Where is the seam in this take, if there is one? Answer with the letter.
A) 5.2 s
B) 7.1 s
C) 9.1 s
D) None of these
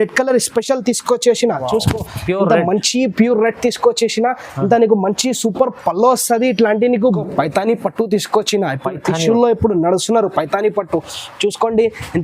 B